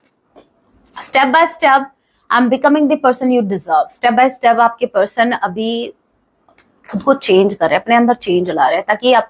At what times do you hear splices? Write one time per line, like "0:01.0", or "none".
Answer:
none